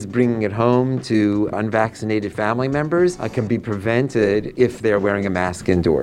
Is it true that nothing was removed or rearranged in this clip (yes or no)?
no